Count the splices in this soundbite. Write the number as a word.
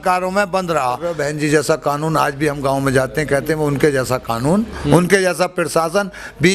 one